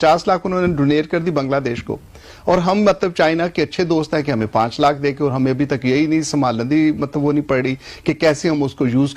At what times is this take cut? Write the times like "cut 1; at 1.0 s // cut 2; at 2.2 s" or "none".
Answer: none